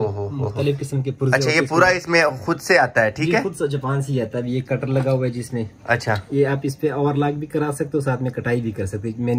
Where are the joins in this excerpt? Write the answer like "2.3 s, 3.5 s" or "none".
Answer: none